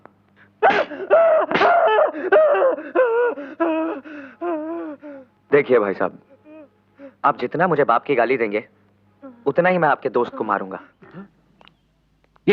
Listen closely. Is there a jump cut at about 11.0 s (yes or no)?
yes